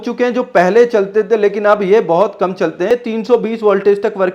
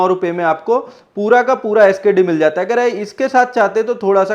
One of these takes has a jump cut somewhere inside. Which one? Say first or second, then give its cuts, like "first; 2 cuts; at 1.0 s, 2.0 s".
first; 1 cut; at 2.9 s